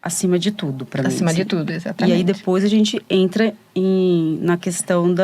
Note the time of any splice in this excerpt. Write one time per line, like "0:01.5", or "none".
none